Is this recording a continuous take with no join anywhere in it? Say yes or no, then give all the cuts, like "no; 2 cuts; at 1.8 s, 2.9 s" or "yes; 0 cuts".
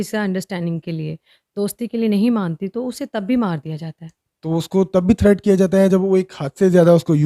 yes; 0 cuts